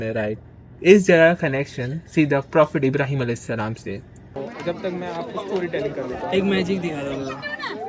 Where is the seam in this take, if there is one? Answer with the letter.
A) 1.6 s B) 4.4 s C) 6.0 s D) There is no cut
B